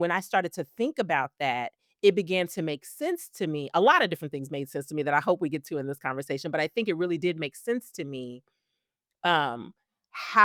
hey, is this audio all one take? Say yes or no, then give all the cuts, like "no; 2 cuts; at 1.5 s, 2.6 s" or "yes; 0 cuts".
yes; 0 cuts